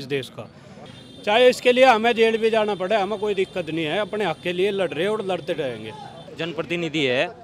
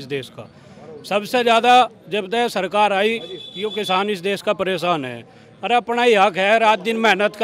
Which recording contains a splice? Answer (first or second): first